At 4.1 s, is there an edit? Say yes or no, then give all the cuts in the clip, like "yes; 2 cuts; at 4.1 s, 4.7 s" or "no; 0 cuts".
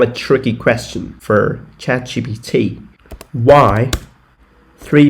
no; 1 cut; at 1.1 s